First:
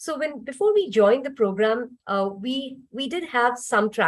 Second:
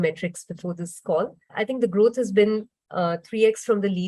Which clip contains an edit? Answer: second; 1 cut; at 1.5 s

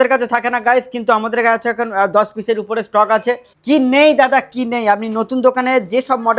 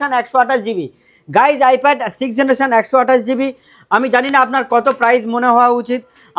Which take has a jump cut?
first; 1 cut; at 3.5 s

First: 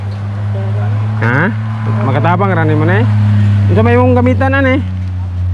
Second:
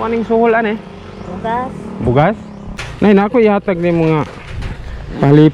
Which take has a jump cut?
second; 1 cut; at 2.7 s

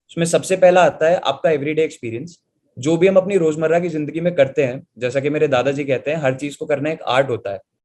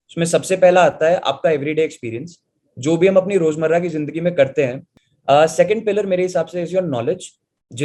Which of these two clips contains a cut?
second; 1 cut; at 4.9 s

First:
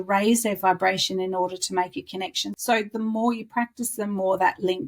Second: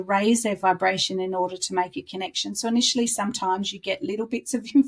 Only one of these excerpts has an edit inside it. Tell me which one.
first; 1 cut; at 2.4 s

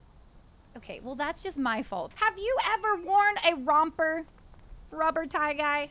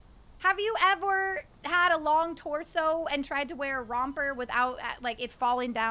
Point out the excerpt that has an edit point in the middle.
first; 1 cut; at 2.1 s

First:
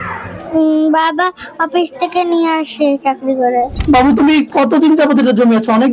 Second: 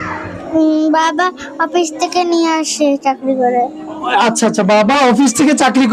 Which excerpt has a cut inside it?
first; 1 cut; at 3.8 s

